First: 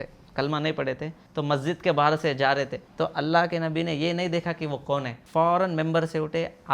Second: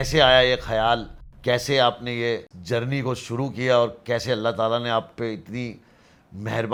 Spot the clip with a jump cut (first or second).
first